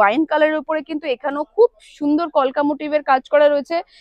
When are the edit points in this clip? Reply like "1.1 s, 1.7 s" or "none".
none